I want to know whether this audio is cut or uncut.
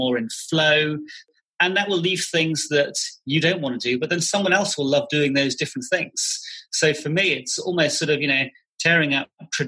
cut